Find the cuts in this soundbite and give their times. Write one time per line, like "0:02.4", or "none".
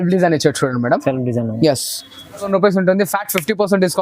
0:02.5